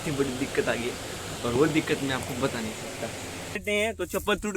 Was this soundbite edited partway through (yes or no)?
yes